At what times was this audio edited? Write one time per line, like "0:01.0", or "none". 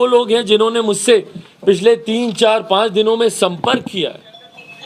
none